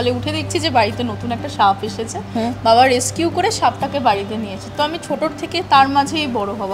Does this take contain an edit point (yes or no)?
no